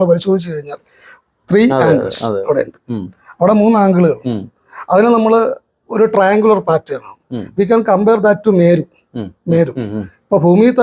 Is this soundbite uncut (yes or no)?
yes